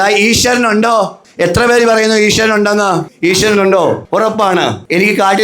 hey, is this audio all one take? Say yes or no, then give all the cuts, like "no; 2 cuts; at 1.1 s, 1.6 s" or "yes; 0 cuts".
no; 3 cuts; at 1.2 s, 3.1 s, 4.5 s